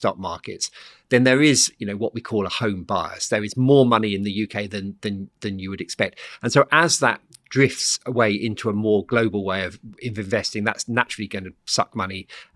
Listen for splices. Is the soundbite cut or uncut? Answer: uncut